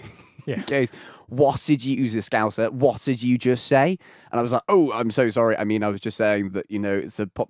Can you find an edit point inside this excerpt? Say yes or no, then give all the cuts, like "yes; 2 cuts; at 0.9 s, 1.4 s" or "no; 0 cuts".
no; 0 cuts